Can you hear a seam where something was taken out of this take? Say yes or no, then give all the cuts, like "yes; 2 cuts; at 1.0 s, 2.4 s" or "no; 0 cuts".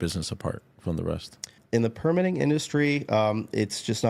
yes; 1 cut; at 1.5 s